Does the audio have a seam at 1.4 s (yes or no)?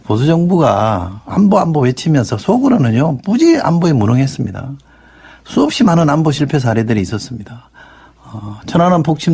yes